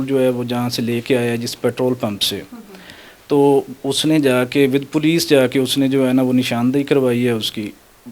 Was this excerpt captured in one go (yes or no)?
yes